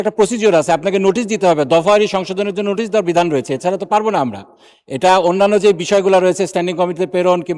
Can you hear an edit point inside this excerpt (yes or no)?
no